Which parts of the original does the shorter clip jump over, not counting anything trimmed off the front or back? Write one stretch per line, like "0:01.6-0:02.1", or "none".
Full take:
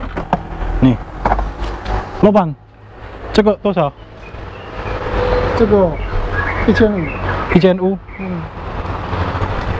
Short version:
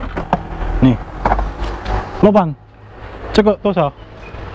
none